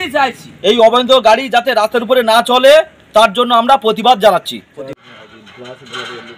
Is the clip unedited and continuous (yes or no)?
no